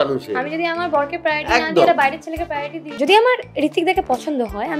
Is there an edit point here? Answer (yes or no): yes